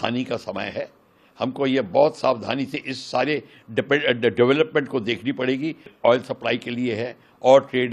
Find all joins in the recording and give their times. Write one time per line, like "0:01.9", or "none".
0:05.9